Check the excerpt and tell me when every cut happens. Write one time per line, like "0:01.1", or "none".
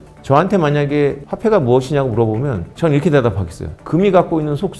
0:02.7
0:03.8